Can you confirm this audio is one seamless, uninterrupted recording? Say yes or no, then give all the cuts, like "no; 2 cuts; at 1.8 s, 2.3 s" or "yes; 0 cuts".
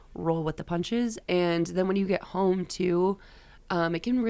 no; 1 cut; at 1.2 s